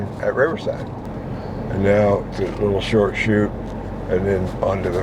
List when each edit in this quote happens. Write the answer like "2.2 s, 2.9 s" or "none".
1.1 s